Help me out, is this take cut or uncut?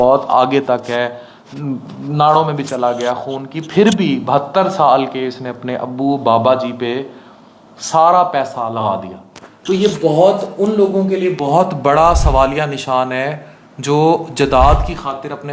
uncut